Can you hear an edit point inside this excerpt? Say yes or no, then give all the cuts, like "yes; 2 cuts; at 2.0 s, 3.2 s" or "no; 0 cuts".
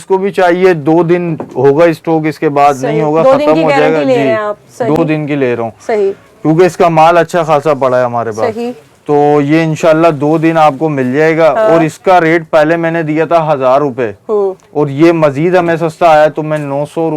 no; 0 cuts